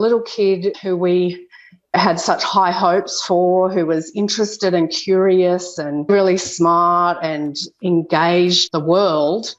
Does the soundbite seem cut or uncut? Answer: cut